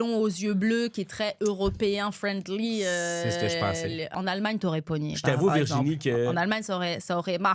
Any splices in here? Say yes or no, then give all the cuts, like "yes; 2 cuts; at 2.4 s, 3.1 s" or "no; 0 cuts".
yes; 1 cut; at 4.1 s